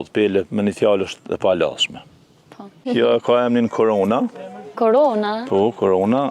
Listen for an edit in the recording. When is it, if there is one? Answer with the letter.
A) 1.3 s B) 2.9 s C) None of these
B